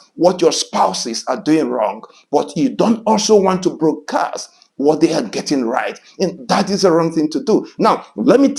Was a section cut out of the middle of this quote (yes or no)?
no